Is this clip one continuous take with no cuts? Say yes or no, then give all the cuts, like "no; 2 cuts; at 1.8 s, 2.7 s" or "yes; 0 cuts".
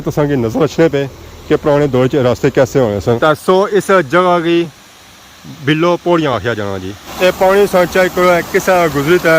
no; 2 cuts; at 3.2 s, 7.1 s